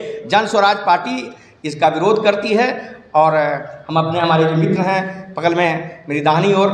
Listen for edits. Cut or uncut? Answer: uncut